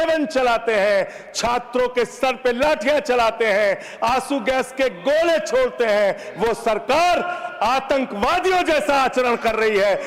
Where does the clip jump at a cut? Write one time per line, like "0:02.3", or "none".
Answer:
none